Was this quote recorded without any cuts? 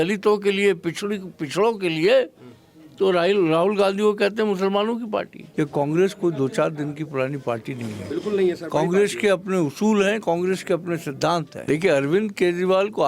no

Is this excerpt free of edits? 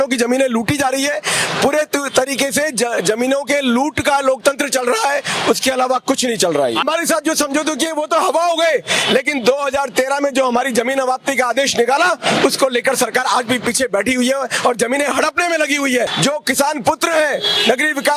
no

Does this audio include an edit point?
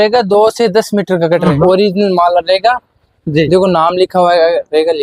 yes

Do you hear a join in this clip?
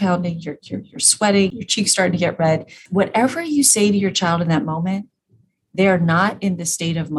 yes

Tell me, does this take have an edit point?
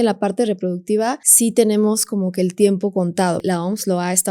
yes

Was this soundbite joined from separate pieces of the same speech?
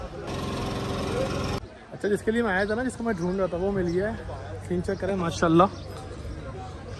yes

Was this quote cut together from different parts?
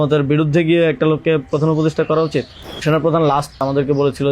yes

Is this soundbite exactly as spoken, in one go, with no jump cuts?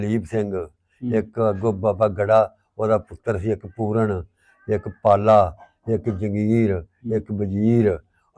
yes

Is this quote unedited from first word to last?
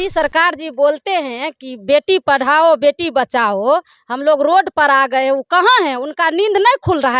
yes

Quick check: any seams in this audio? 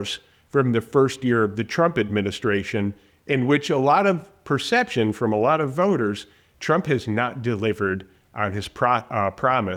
no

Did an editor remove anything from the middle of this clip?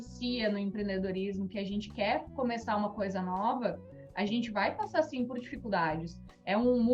no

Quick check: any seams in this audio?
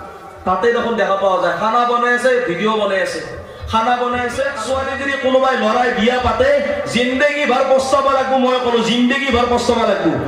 yes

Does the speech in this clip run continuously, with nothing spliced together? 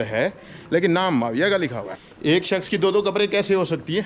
no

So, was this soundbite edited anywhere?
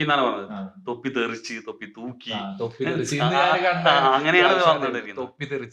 no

